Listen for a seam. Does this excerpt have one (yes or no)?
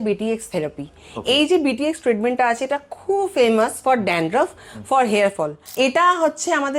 yes